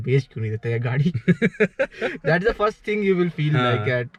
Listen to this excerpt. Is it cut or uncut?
uncut